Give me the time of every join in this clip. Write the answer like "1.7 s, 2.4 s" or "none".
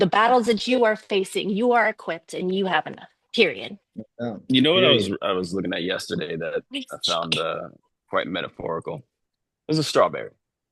none